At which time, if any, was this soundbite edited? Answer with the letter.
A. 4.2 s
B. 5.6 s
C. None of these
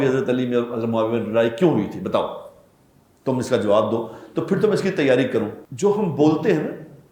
B